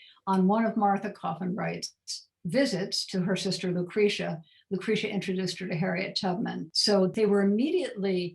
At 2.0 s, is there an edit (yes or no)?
no